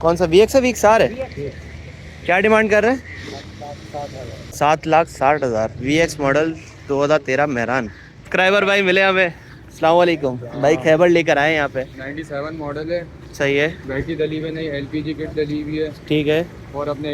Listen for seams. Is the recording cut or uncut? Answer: cut